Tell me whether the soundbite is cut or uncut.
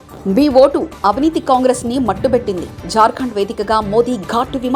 uncut